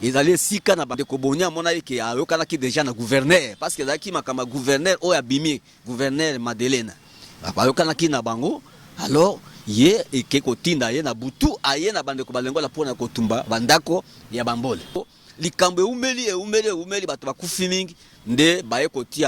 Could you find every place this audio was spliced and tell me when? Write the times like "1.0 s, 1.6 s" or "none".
0.9 s, 15.1 s